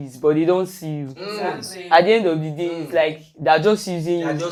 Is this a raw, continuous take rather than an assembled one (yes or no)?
yes